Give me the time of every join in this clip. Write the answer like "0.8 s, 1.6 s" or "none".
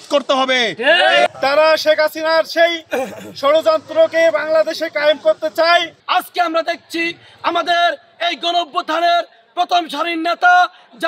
1.4 s, 6.0 s